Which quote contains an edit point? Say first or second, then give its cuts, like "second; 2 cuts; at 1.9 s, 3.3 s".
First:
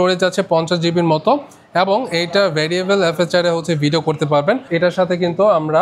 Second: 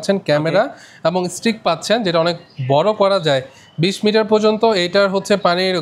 first; 1 cut; at 4.7 s